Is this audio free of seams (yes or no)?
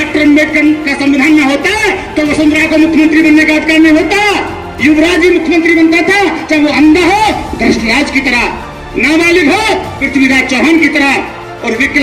yes